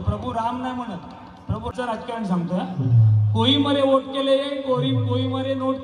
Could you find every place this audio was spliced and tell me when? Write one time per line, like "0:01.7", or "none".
0:01.7